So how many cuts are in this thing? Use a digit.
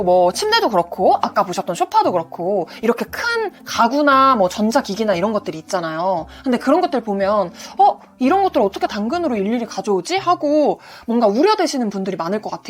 0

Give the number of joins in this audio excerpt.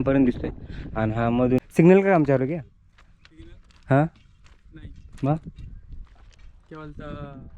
1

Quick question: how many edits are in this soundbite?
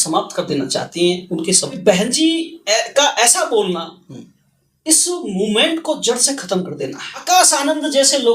2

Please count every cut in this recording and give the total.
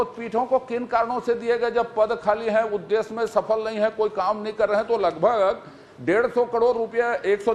0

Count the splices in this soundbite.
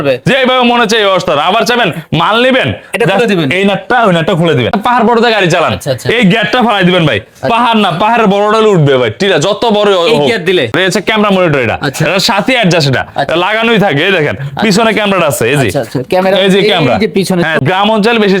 3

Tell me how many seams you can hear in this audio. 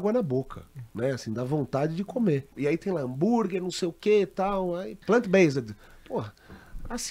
2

